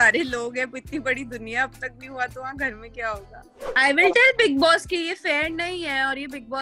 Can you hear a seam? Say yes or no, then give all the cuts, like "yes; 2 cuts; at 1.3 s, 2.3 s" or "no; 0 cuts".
yes; 1 cut; at 3.6 s